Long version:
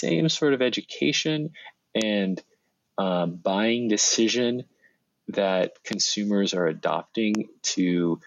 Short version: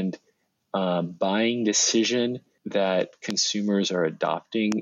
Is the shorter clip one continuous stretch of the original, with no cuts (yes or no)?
no